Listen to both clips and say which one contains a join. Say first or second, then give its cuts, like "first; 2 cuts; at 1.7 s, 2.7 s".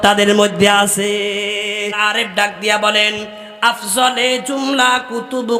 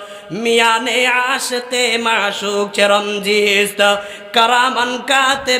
first; 1 cut; at 1.9 s